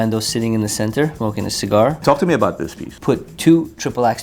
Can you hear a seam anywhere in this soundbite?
yes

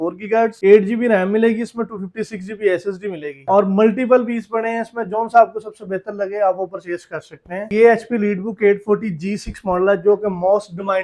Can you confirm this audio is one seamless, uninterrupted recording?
no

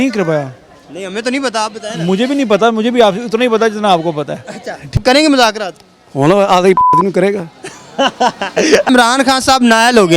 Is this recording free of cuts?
no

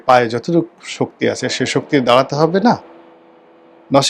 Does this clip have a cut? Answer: no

